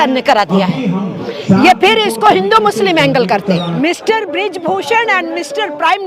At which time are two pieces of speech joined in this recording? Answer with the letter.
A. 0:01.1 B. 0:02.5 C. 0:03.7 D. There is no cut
C